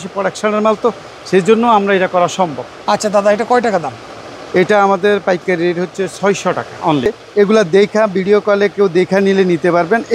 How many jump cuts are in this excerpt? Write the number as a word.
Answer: one